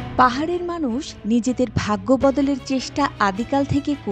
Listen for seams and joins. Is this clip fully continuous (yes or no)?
yes